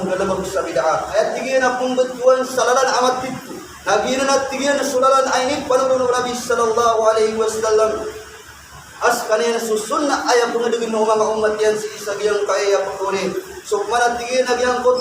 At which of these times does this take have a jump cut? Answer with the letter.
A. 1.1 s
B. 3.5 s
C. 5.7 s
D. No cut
A